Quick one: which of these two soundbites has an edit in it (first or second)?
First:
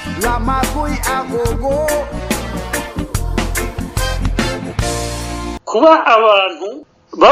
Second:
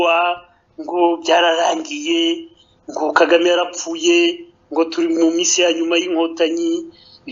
first